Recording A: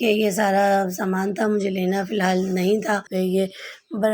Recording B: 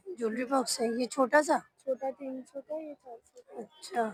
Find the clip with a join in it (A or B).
A